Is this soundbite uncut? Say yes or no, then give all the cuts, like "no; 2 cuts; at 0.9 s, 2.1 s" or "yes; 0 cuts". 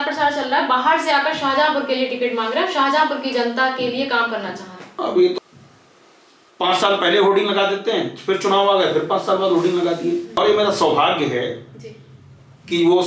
no; 2 cuts; at 5.4 s, 10.3 s